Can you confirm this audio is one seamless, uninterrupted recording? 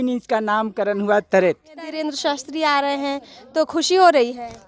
no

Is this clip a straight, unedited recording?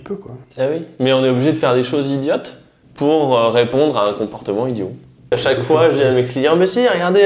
no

